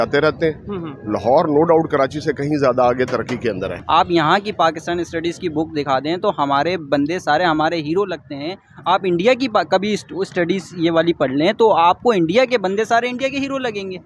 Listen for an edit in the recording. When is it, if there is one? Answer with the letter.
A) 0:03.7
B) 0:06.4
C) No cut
A